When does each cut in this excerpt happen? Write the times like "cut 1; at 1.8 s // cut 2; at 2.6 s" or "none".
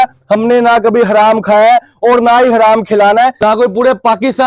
cut 1; at 3.4 s